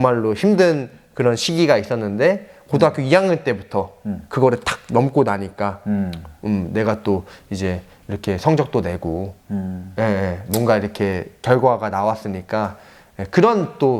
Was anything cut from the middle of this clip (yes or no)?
no